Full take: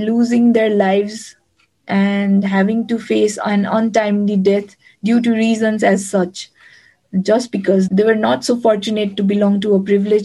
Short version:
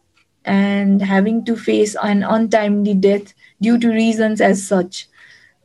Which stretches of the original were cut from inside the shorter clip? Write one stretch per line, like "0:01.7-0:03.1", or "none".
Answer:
none